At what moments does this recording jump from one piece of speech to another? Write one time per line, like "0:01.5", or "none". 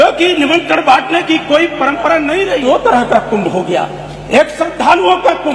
0:02.5